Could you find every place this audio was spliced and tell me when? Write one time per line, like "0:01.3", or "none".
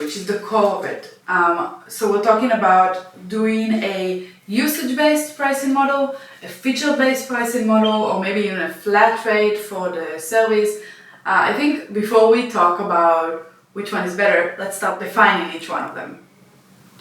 0:15.0